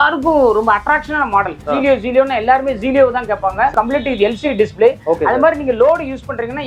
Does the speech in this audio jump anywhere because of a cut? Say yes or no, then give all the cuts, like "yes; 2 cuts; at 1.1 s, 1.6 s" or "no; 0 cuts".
yes; 1 cut; at 3.7 s